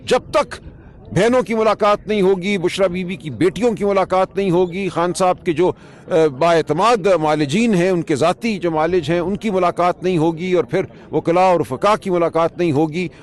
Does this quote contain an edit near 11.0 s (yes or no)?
no